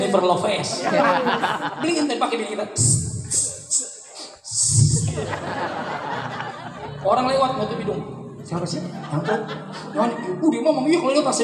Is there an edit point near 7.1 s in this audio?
no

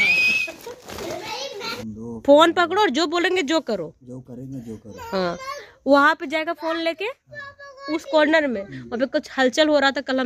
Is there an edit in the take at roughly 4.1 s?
no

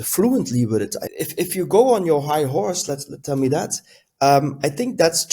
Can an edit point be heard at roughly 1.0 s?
yes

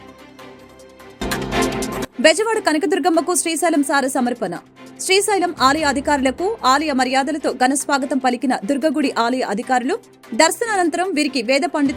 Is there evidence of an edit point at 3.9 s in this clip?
no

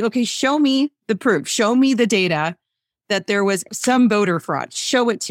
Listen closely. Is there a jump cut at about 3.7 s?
yes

